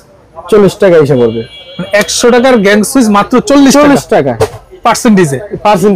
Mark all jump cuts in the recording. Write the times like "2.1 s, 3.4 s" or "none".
none